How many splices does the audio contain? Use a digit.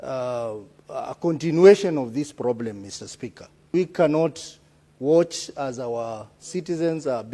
1